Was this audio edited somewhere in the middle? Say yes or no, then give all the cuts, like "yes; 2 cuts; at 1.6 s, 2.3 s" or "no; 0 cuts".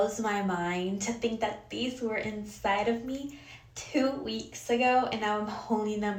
no; 0 cuts